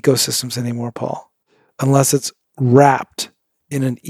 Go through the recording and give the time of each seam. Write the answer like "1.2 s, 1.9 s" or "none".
none